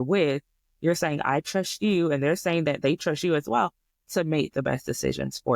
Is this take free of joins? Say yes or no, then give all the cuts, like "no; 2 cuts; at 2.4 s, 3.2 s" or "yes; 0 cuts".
yes; 0 cuts